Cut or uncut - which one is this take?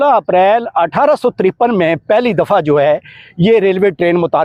uncut